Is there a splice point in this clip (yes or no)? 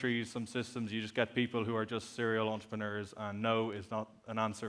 no